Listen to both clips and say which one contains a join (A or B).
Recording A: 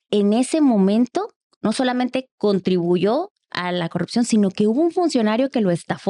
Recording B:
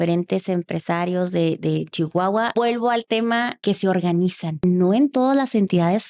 B